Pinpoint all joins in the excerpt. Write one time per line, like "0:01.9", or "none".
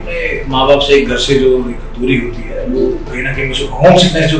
none